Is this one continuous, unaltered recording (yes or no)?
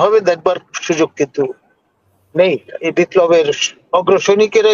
no